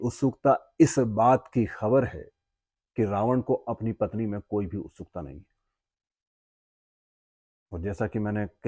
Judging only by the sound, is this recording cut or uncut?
uncut